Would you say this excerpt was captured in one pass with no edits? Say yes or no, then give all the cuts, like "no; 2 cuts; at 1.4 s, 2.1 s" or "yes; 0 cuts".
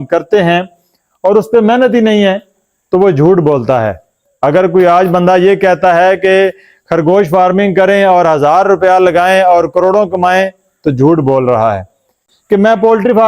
no; 1 cut; at 12.3 s